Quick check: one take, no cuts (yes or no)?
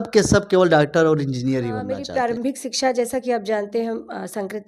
no